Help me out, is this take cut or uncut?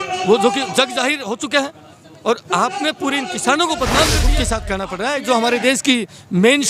cut